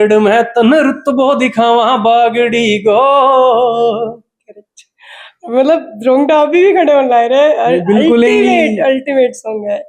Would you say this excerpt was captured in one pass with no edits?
yes; 0 cuts

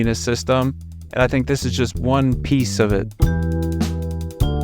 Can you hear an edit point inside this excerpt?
yes; 1 cut; at 3.2 s

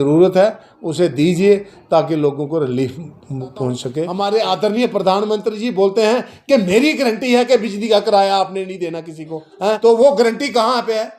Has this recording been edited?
yes; 2 cuts; at 3.9 s, 9.8 s

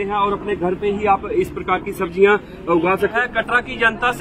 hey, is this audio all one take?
no; 1 cut; at 3.1 s

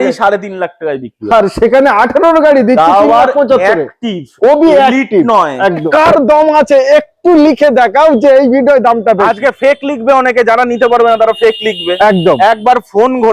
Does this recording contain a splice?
yes; 1 cut; at 5.9 s

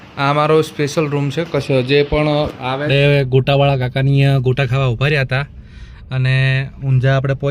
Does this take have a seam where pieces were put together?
yes; 1 cut; at 2.8 s

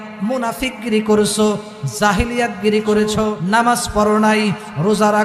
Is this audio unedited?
no; 1 cut; at 3.3 s

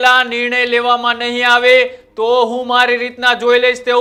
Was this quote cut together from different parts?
no; 0 cuts

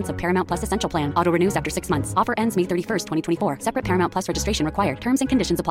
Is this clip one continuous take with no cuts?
yes; 0 cuts

